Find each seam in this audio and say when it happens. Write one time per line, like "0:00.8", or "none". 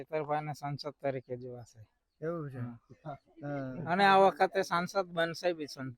none